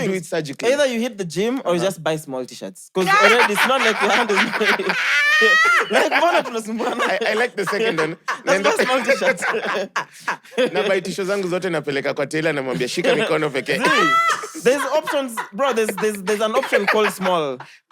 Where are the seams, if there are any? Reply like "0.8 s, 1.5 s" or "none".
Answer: none